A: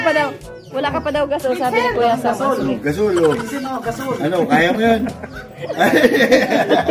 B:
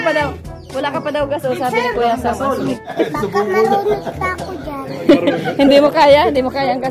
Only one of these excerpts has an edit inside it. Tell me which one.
B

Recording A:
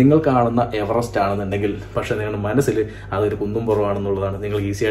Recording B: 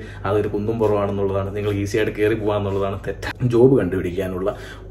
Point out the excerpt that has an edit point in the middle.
B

